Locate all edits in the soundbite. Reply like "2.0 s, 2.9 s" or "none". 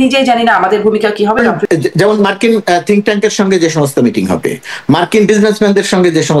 1.4 s